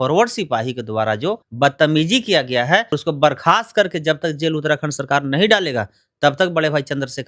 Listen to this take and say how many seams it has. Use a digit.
2